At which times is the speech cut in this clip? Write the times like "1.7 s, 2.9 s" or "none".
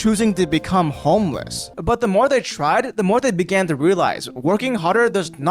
1.7 s